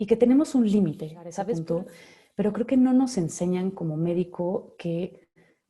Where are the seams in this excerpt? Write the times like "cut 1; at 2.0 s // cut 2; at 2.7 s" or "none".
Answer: cut 1; at 1.5 s